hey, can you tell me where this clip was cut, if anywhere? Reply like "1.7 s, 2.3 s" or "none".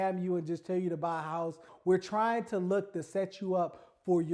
1.7 s